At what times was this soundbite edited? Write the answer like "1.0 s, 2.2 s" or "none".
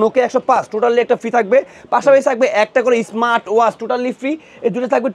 none